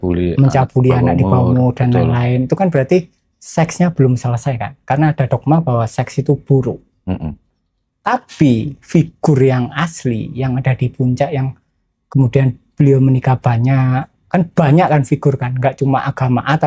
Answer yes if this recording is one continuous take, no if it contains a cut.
yes